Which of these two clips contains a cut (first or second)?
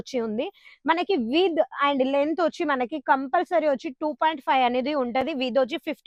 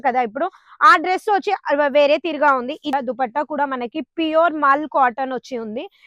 second